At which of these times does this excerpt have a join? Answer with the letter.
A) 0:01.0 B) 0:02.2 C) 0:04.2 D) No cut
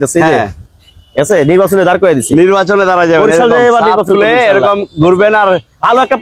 D